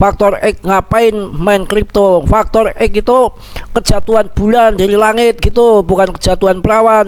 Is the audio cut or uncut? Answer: uncut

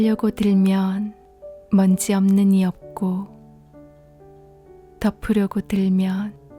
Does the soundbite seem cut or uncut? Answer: uncut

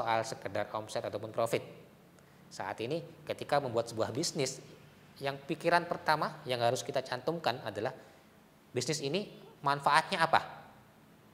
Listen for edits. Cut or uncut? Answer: uncut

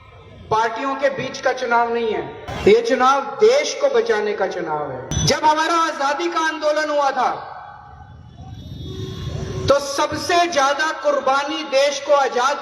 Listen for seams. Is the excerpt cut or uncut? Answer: cut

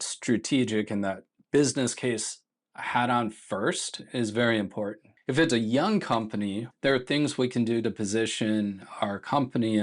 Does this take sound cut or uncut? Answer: cut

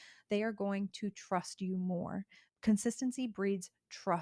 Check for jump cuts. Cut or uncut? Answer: cut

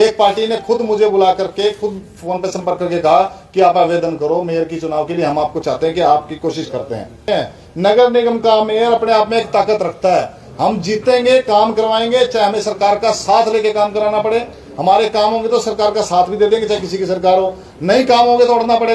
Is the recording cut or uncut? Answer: cut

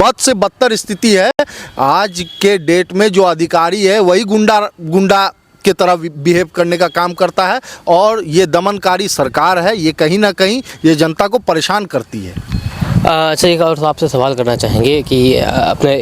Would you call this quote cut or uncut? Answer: uncut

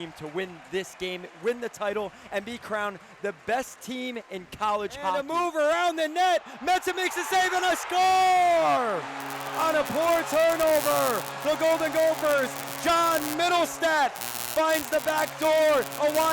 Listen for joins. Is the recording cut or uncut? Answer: cut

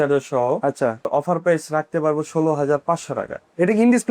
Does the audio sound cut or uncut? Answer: cut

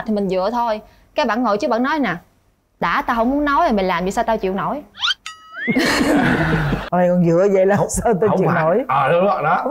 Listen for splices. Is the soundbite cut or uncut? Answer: cut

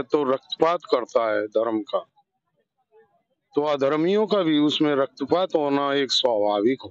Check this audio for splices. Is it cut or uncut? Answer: uncut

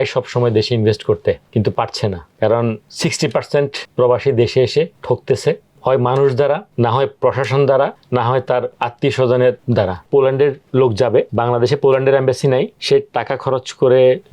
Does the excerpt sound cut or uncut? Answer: cut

